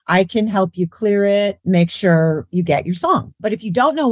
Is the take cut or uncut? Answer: cut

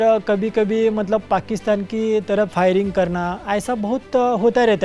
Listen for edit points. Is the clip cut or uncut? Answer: cut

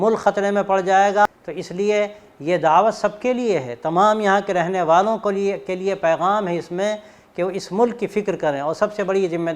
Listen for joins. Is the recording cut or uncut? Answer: cut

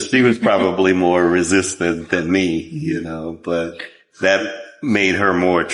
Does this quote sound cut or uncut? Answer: uncut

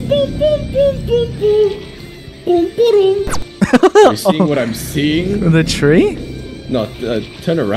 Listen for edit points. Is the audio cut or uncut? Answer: uncut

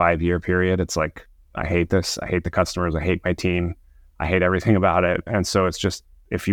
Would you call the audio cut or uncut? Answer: uncut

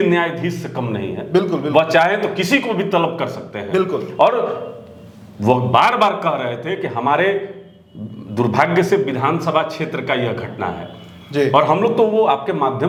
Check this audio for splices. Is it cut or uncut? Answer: uncut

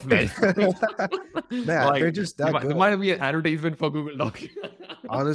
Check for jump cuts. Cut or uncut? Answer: uncut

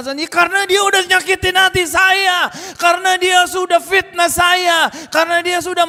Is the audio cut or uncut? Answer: uncut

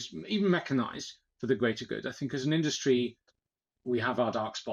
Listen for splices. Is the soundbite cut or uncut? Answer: uncut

